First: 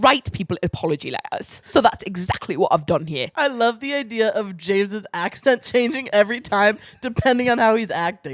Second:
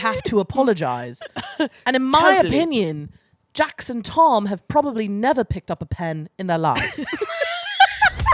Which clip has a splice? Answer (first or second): first